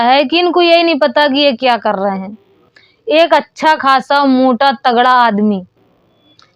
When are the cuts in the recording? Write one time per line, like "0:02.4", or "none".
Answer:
none